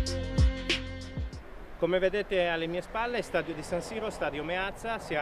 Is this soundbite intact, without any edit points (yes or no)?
no